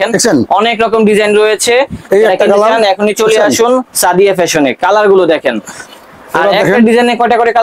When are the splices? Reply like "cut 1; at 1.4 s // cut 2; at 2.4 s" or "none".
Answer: none